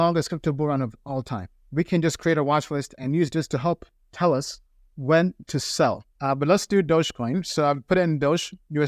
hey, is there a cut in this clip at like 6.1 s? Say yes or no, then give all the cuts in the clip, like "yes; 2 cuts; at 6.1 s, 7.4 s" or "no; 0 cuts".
yes; 1 cut; at 6.1 s